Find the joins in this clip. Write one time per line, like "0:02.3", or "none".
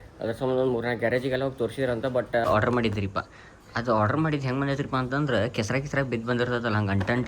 0:02.5